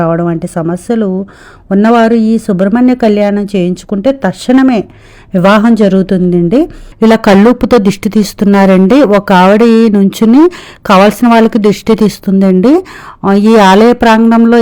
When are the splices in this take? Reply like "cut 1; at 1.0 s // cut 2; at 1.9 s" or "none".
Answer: cut 1; at 6.8 s